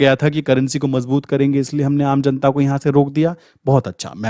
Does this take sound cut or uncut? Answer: uncut